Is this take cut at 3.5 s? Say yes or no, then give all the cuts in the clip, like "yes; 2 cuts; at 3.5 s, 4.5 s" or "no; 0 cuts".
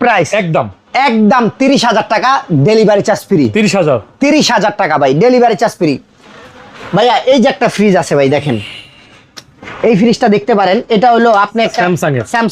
no; 0 cuts